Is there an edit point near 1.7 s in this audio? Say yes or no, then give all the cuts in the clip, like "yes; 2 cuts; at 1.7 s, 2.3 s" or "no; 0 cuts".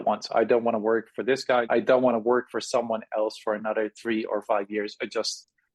yes; 1 cut; at 1.7 s